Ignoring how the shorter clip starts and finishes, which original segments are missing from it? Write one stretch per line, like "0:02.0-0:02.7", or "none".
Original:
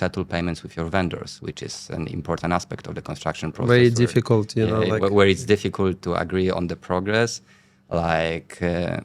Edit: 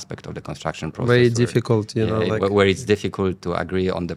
none